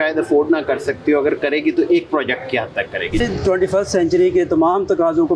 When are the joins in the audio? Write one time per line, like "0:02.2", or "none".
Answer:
0:03.2